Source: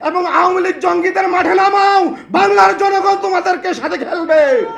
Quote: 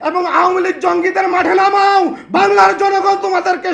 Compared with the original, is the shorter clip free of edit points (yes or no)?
yes